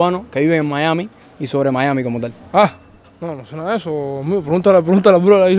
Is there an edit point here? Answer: no; 0 cuts

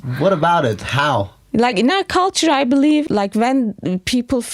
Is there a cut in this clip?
yes; 1 cut; at 3.1 s

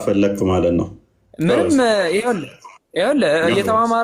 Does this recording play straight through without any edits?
yes; 0 cuts

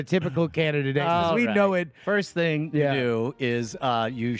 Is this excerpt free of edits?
no; 1 cut; at 2.0 s

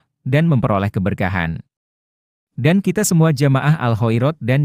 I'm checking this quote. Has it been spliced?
no; 0 cuts

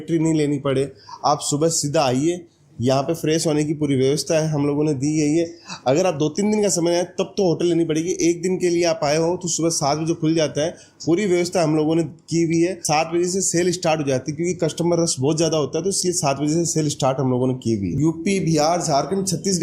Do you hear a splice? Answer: no; 0 cuts

